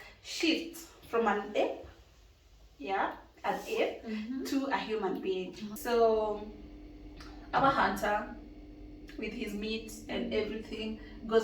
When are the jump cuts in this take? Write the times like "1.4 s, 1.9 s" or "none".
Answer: 5.7 s